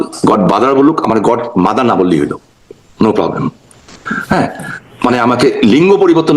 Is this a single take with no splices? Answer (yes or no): yes